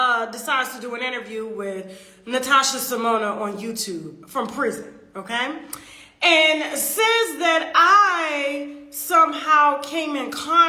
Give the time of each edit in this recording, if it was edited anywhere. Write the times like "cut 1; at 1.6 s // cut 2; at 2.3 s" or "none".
none